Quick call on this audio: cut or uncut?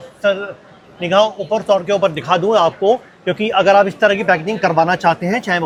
uncut